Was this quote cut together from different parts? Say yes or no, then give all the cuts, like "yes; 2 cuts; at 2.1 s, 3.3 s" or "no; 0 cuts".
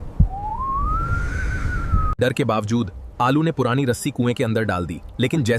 yes; 1 cut; at 2.1 s